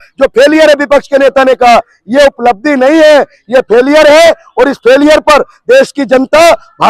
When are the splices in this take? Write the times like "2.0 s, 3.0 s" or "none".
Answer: none